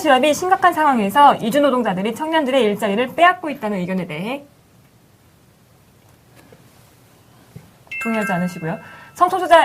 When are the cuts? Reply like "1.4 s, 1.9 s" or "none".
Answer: 1.9 s